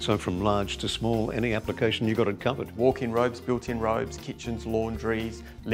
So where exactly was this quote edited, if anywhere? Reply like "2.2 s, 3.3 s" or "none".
2.7 s